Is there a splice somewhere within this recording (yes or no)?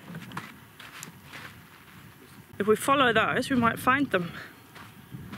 yes